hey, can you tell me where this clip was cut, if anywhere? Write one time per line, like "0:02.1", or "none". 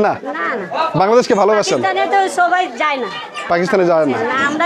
none